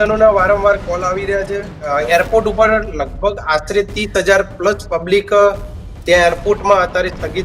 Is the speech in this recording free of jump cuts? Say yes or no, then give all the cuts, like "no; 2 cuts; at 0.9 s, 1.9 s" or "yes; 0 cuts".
no; 1 cut; at 1.9 s